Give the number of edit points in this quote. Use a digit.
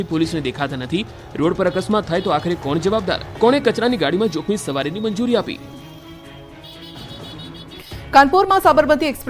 1